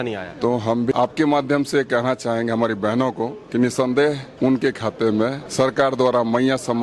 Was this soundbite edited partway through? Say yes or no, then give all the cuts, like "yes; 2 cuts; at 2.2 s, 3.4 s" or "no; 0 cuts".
yes; 4 cuts; at 0.9 s, 3.4 s, 4.3 s, 5.4 s